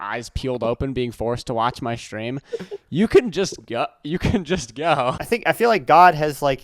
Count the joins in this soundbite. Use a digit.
1